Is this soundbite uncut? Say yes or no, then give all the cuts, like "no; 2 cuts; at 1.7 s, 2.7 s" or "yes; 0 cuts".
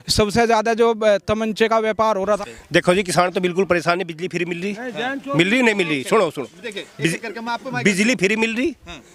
no; 1 cut; at 2.4 s